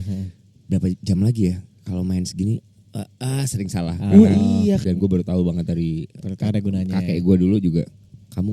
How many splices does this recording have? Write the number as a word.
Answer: one